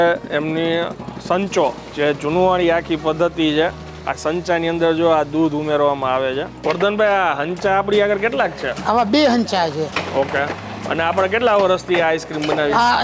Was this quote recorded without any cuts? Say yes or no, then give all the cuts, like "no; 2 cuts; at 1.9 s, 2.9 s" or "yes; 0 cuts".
no; 2 cuts; at 1.9 s, 6.5 s